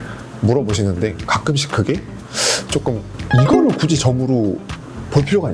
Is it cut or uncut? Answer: cut